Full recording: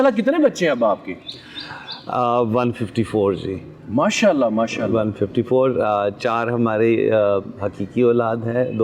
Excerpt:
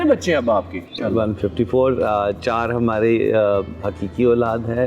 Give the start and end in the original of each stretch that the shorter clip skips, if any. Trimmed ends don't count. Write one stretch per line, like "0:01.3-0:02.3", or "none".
0:01.3-0:04.8